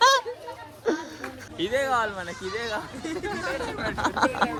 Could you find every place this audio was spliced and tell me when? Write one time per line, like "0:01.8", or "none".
none